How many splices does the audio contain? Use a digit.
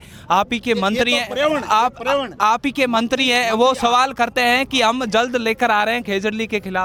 0